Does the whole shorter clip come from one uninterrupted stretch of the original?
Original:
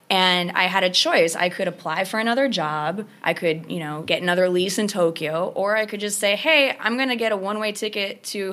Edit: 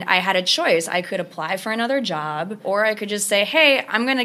no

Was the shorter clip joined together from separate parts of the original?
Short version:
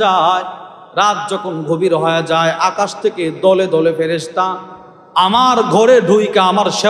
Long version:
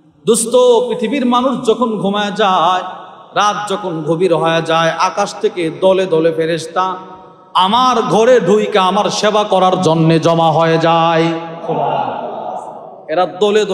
no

